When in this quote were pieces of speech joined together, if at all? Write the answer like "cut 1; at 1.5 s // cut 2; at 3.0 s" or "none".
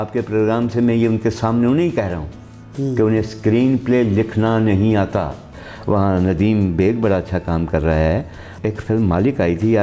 cut 1; at 5.6 s // cut 2; at 8.5 s